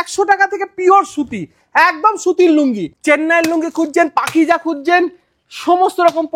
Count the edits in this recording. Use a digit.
1